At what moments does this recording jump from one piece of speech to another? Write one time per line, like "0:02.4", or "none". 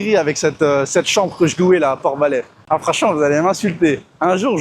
0:02.6